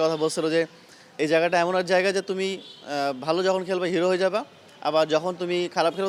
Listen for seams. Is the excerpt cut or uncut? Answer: uncut